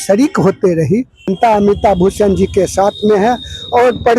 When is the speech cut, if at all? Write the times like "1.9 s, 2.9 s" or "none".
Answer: 1.3 s